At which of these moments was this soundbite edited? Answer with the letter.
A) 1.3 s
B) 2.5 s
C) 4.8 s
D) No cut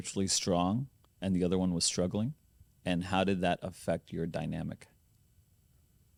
D